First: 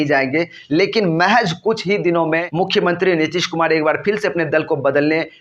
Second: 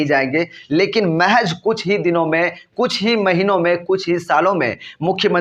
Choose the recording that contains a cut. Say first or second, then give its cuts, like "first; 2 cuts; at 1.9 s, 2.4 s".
first; 1 cut; at 2.5 s